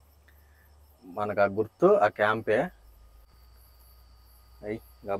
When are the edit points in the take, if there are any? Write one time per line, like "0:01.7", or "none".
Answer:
none